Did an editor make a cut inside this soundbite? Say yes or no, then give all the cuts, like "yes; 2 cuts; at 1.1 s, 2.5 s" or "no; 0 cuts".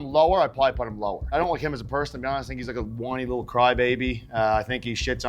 yes; 1 cut; at 1.3 s